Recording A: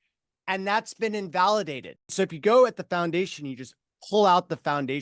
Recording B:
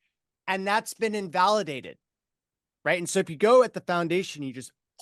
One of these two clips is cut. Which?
A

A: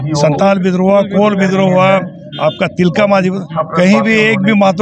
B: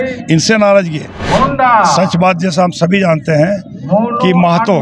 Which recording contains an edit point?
B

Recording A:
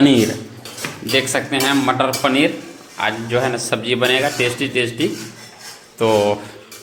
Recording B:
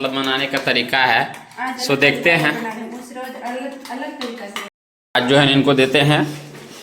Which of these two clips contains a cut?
B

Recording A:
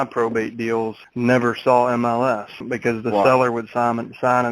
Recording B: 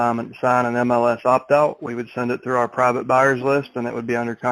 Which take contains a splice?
A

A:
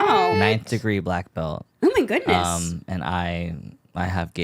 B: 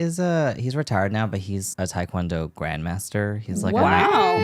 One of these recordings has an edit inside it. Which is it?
A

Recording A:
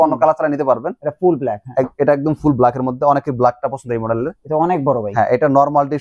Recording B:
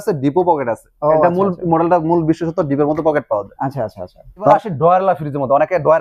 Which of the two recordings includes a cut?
B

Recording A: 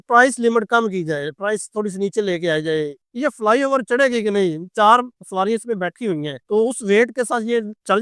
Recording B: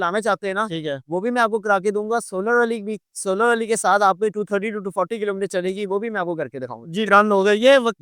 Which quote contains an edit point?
A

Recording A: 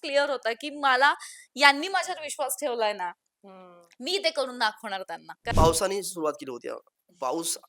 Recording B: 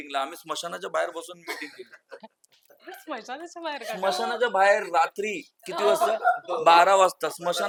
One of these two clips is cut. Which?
A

